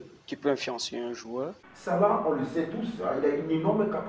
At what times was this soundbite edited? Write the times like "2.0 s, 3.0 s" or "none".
1.7 s